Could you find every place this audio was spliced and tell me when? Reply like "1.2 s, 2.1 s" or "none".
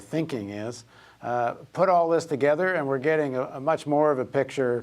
3.7 s